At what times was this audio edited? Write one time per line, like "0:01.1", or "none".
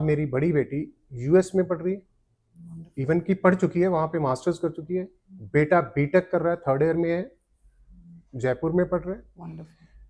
none